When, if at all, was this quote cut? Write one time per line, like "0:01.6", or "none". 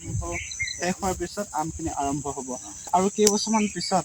0:02.9